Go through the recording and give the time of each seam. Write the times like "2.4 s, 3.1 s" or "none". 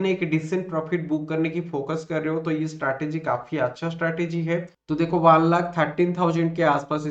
4.7 s